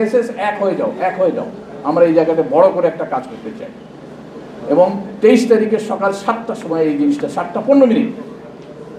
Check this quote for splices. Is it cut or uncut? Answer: uncut